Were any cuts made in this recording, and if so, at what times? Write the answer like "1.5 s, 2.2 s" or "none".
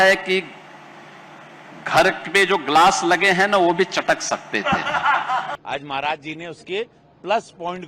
5.6 s